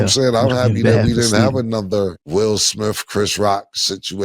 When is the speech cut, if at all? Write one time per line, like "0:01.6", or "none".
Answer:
0:02.2